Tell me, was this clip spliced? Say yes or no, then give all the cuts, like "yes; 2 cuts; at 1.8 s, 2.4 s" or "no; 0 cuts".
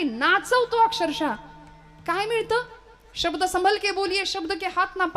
no; 0 cuts